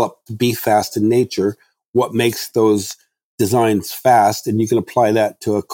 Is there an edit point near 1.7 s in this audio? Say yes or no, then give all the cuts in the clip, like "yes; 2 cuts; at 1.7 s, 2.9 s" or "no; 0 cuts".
no; 0 cuts